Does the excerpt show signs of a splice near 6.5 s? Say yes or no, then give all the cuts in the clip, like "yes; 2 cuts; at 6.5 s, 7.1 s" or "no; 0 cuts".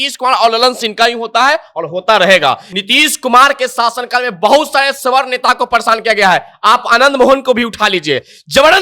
no; 1 cut; at 2.7 s